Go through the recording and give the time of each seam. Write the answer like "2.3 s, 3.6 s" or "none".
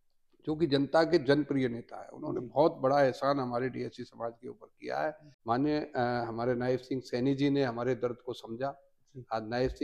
5.3 s